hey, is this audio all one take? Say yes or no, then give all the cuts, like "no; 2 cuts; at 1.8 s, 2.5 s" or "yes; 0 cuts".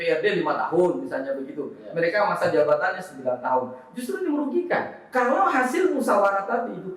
no; 1 cut; at 5.0 s